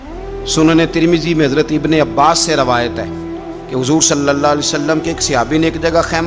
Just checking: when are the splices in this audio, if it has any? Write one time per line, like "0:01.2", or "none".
none

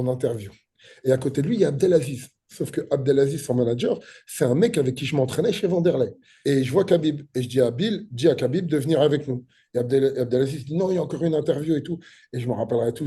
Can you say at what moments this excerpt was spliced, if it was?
0:06.3

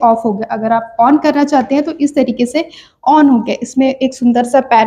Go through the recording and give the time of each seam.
none

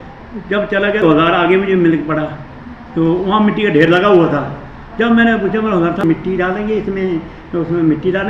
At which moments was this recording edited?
0:01.0
0:06.0

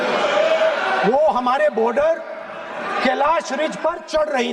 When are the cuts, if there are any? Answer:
none

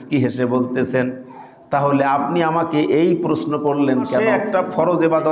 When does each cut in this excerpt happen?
0:04.3

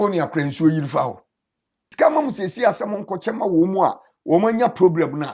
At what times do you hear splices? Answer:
0:01.9

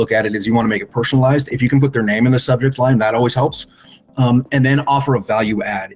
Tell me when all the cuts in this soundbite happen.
none

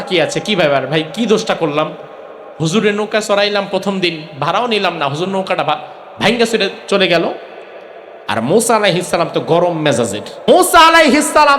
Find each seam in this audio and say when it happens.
0:10.4

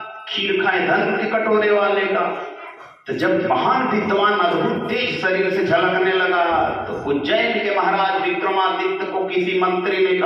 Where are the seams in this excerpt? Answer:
none

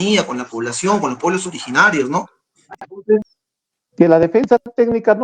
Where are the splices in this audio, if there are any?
0:03.4

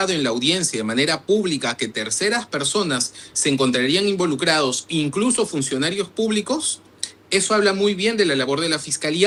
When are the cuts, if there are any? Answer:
none

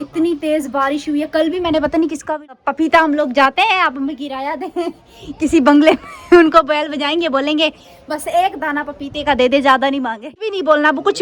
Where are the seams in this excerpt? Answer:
0:02.5
0:10.2

